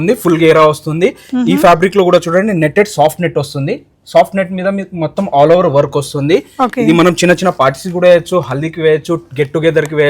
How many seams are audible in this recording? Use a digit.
0